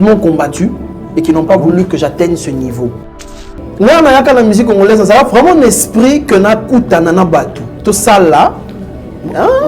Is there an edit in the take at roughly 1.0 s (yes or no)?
no